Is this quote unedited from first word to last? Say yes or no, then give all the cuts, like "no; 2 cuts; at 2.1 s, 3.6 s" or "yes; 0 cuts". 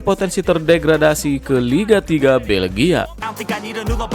no; 1 cut; at 3.1 s